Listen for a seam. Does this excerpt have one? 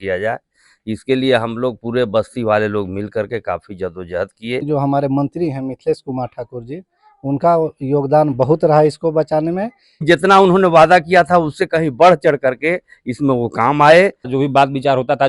yes; 3 cuts; at 4.7 s, 10.0 s, 14.3 s

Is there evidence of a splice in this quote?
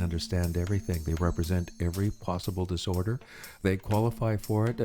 yes; 1 cut; at 3.6 s

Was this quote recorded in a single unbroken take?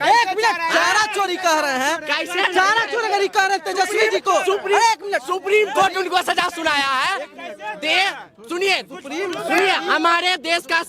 yes; 0 cuts

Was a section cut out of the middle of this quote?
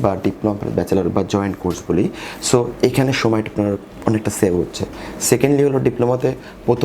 no; 0 cuts

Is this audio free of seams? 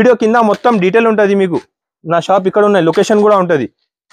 yes; 0 cuts

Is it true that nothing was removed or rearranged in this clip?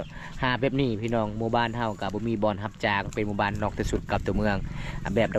yes; 0 cuts

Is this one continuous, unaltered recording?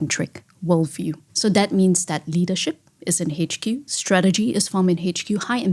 no; 1 cut; at 1.2 s

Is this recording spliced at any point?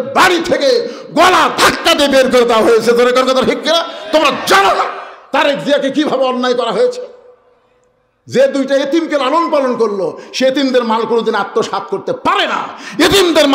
no; 0 cuts

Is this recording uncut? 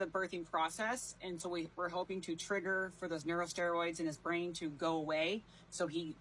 yes; 0 cuts

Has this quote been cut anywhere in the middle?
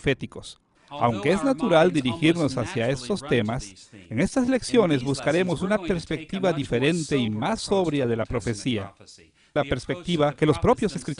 yes; 1 cut; at 7.1 s

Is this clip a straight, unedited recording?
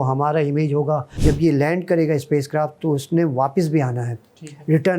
no; 1 cut; at 1.1 s

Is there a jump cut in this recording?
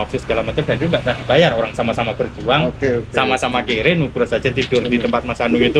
no; 0 cuts

